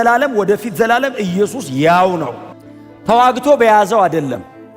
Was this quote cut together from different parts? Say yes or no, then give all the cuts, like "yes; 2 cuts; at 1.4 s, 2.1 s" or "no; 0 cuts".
yes; 1 cut; at 2.4 s